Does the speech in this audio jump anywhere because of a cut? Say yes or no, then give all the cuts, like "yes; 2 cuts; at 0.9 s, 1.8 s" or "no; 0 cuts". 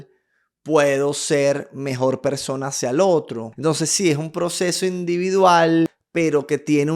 yes; 2 cuts; at 3.4 s, 6.0 s